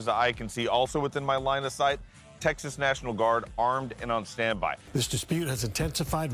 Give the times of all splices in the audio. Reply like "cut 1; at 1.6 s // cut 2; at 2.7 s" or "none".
none